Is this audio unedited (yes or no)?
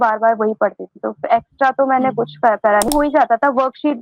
no